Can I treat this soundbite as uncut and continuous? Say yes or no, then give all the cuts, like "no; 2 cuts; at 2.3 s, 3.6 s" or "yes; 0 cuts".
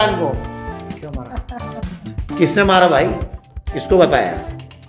yes; 0 cuts